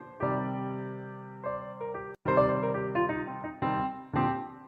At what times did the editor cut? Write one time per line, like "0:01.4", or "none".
0:02.1